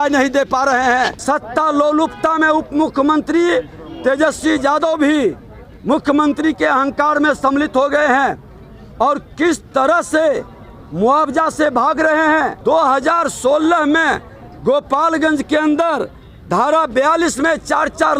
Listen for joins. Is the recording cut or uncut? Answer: cut